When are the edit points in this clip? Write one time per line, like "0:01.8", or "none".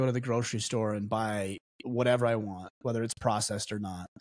none

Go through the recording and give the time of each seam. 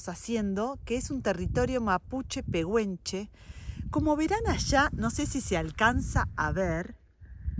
none

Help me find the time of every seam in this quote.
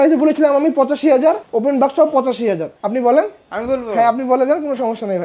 0:01.5
0:02.8

